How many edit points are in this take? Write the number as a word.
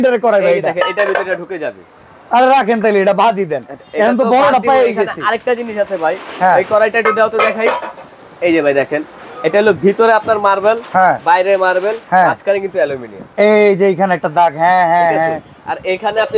zero